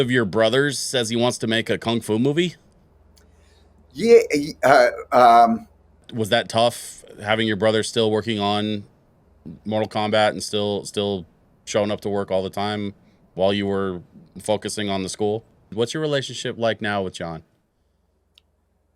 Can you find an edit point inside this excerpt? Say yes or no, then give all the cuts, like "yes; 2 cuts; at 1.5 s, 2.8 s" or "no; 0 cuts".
yes; 2 cuts; at 6.1 s, 15.7 s